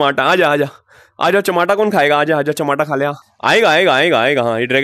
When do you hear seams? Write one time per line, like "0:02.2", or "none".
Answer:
0:03.3

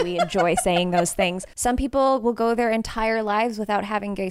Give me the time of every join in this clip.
0:01.5

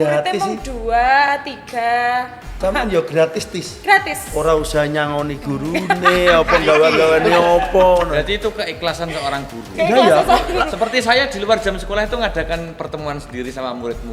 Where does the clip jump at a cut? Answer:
0:02.6

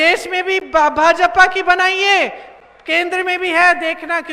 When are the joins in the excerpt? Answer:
none

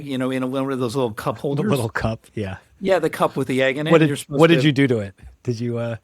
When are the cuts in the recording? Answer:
none

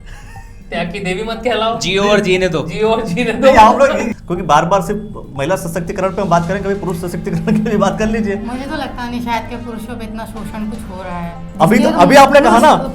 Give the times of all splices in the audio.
0:04.1

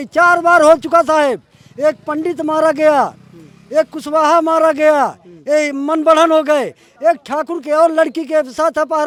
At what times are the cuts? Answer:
none

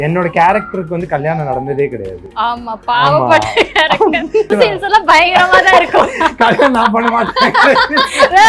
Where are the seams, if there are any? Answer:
0:04.5

